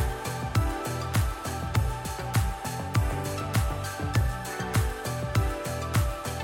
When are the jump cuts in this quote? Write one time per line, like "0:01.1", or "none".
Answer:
none